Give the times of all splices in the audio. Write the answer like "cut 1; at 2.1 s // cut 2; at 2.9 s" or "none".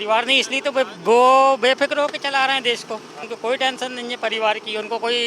cut 1; at 3.2 s